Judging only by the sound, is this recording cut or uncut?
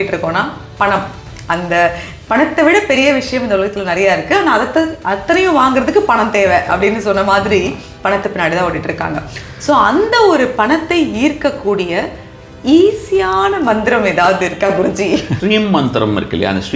cut